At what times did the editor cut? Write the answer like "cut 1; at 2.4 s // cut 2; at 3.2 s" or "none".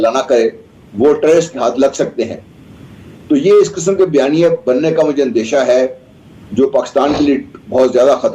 none